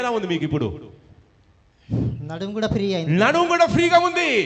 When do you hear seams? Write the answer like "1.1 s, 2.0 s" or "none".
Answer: none